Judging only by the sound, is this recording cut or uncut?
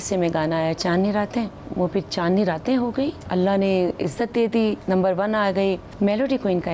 cut